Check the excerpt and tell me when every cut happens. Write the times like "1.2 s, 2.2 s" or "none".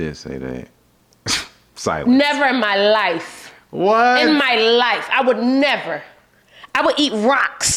none